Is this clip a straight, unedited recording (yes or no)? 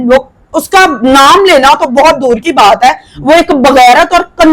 yes